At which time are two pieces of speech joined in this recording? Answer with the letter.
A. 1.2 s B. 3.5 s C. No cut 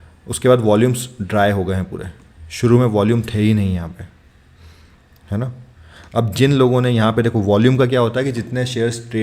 C